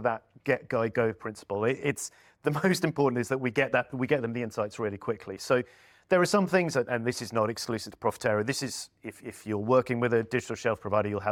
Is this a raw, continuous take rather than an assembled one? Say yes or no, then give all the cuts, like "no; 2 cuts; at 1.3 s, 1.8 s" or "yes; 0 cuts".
yes; 0 cuts